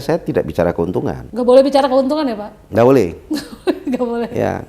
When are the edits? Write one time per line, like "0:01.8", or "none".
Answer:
0:01.2